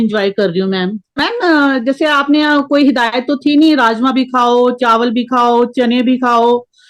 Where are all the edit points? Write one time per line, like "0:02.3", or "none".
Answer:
0:01.2